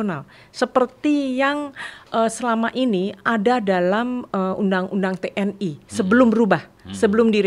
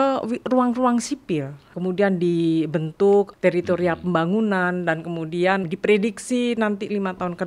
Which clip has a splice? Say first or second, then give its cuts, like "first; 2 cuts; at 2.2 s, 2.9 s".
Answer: second; 3 cuts; at 1.7 s, 3.3 s, 5.7 s